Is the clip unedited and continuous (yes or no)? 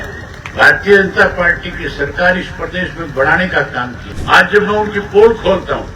no